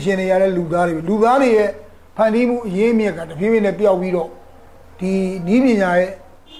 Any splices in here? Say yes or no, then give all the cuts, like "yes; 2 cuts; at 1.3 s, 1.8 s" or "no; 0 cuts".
no; 0 cuts